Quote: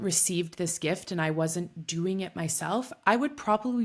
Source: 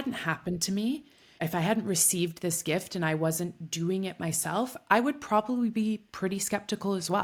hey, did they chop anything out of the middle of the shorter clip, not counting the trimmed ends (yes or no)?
no